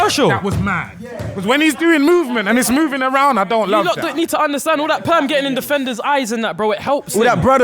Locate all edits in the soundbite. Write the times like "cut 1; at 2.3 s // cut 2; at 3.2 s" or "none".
cut 1; at 3.8 s